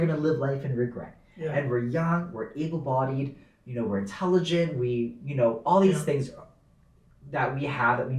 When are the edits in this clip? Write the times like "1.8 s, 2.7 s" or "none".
none